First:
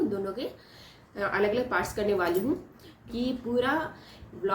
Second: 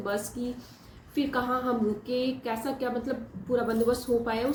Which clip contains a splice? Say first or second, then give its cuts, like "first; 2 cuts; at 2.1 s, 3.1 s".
first; 1 cut; at 3.1 s